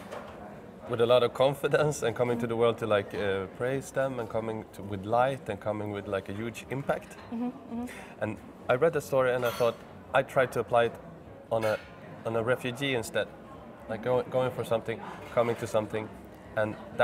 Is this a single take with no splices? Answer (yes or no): yes